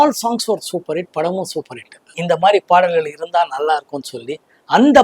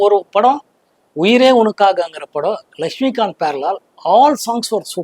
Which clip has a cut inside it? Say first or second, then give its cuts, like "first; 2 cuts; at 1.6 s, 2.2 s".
first; 1 cut; at 2.1 s